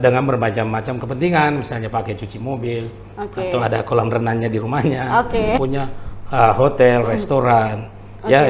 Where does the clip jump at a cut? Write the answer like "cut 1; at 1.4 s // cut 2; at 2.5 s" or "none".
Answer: cut 1; at 5.6 s